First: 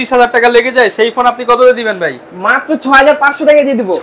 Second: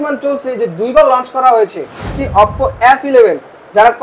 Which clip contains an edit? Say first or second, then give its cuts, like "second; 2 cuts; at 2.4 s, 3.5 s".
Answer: second; 1 cut; at 2.2 s